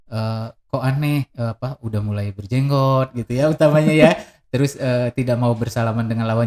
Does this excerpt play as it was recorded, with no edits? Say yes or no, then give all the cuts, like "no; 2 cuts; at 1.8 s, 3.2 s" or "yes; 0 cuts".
yes; 0 cuts